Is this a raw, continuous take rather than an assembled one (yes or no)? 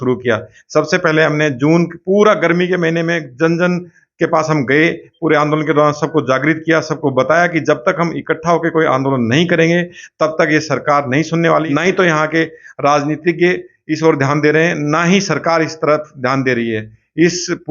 no